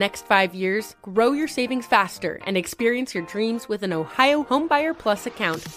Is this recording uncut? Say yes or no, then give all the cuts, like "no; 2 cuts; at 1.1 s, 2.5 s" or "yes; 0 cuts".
yes; 0 cuts